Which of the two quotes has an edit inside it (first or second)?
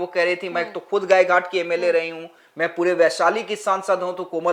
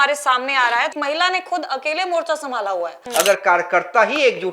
second